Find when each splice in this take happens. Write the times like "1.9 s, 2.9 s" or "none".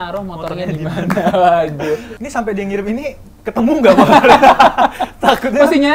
2.2 s